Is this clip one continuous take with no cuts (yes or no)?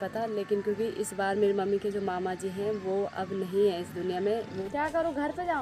no